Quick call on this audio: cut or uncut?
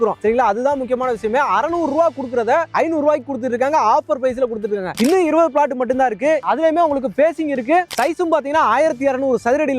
cut